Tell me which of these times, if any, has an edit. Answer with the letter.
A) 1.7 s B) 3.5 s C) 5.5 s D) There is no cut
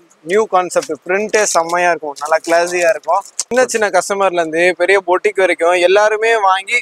B